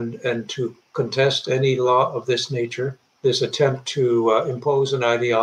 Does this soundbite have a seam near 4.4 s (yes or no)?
no